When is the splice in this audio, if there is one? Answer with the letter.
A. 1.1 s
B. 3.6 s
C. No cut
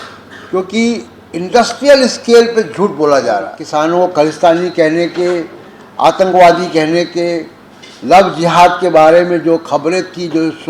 B